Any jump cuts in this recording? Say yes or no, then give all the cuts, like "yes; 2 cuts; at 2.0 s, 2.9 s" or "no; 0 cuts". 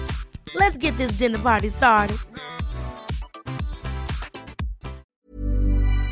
yes; 1 cut; at 5.1 s